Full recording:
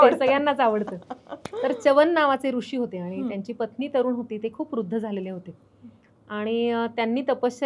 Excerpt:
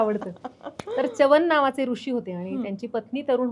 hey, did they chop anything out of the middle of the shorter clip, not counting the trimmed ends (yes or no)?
no